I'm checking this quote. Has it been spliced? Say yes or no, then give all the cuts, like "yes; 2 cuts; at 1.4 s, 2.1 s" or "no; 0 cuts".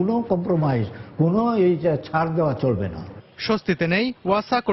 no; 0 cuts